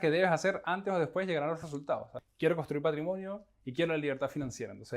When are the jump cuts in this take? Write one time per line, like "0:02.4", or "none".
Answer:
0:02.2